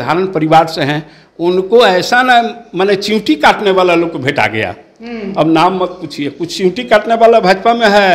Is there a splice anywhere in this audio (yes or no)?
no